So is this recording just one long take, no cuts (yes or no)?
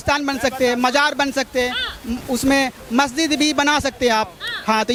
yes